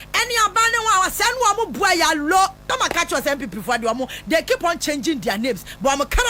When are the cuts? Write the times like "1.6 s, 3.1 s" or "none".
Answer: 2.6 s